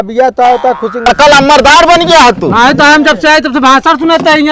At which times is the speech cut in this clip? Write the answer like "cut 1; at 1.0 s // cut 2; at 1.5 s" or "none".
cut 1; at 1.1 s